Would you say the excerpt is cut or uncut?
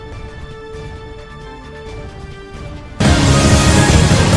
cut